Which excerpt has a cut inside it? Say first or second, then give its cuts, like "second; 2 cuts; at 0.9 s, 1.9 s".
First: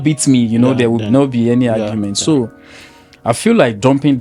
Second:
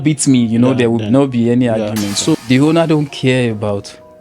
second; 1 cut; at 2.4 s